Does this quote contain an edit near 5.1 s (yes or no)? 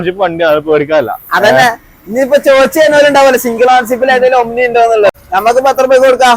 yes